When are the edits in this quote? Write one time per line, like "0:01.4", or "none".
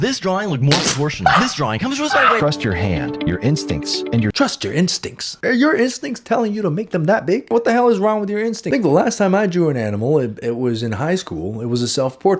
0:02.4
0:08.7